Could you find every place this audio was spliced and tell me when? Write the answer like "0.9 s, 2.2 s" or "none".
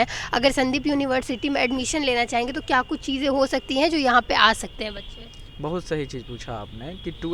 none